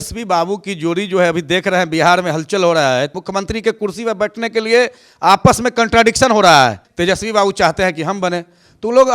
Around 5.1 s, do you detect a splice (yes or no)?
no